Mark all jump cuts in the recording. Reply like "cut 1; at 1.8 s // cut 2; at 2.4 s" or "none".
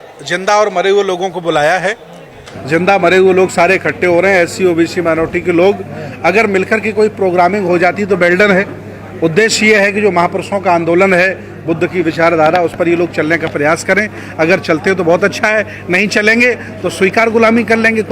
none